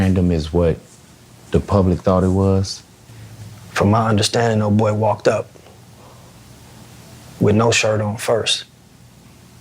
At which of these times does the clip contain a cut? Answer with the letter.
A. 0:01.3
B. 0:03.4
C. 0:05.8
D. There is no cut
B